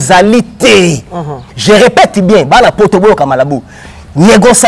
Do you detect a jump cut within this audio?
no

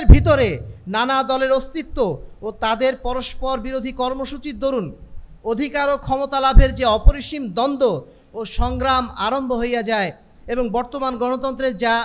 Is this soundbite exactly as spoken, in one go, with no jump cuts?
yes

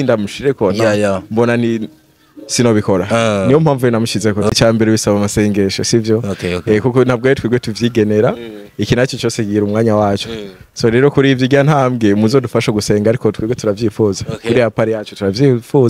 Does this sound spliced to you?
yes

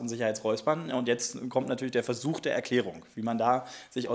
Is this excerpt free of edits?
yes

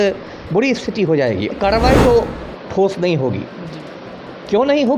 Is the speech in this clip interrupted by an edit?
yes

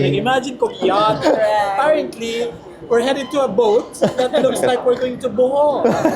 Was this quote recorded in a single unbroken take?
no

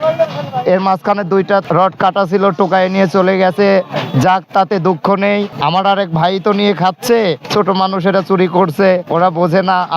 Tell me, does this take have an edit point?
yes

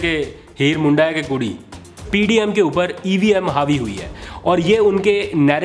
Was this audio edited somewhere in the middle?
yes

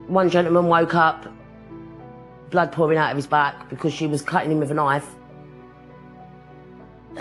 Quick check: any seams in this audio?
no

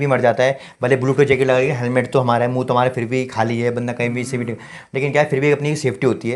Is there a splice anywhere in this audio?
no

